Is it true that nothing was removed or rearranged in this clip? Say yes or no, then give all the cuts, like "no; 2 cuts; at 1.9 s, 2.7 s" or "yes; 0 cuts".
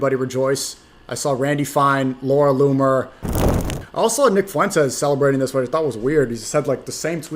no; 1 cut; at 3.6 s